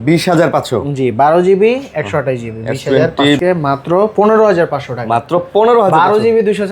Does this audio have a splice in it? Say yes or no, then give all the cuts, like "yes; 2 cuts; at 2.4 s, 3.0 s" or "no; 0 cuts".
yes; 1 cut; at 3.4 s